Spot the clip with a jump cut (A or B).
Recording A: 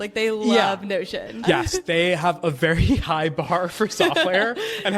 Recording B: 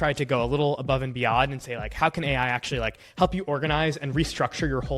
A